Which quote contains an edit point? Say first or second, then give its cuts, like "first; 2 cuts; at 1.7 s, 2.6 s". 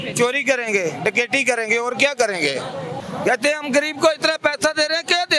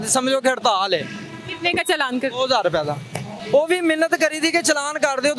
first; 1 cut; at 3.0 s